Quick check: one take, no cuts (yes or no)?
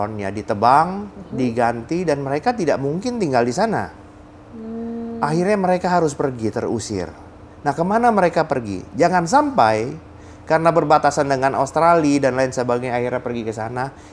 yes